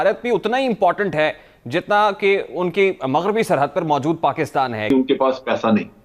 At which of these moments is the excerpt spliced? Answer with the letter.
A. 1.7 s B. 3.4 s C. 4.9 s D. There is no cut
C